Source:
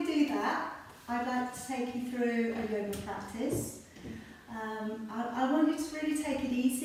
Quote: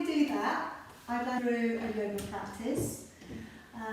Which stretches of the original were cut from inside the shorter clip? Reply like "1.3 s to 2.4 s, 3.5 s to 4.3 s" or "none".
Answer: 1.4 s to 2.1 s